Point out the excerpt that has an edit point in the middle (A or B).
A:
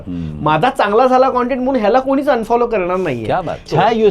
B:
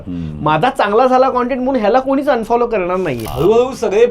B